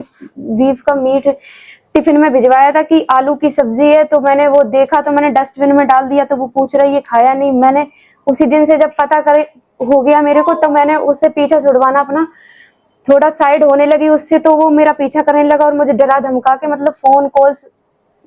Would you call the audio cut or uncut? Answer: uncut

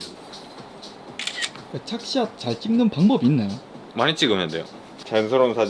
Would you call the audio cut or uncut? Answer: uncut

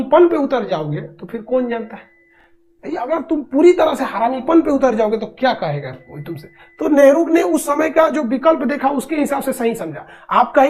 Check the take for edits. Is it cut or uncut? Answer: uncut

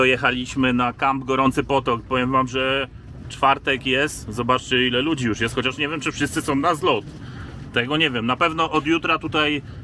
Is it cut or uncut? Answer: uncut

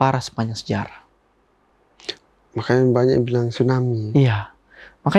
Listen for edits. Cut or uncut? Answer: uncut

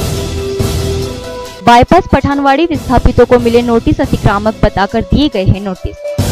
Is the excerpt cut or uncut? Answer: cut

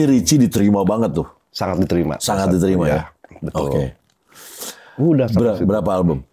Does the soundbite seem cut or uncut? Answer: uncut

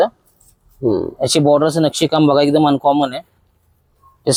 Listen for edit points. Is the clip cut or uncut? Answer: uncut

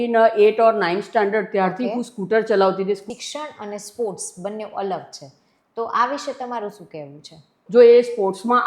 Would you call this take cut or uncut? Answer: cut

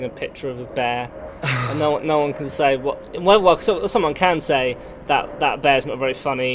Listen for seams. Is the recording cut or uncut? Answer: uncut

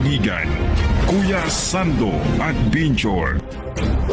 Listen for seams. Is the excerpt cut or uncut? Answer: uncut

